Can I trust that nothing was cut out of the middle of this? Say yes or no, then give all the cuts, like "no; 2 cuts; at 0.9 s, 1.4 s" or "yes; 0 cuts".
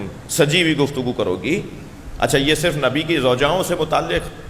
yes; 0 cuts